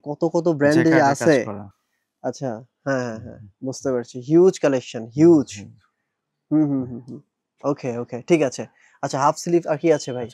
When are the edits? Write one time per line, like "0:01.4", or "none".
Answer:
none